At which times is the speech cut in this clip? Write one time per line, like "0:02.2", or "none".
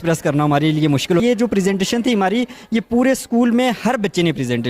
0:01.2